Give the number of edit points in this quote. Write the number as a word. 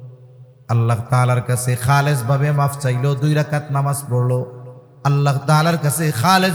zero